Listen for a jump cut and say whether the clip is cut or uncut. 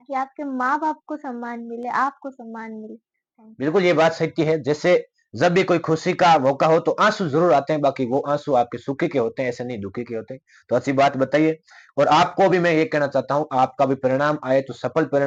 uncut